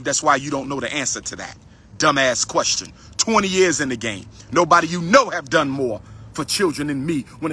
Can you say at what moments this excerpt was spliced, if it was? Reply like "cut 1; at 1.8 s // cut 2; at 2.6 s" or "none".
none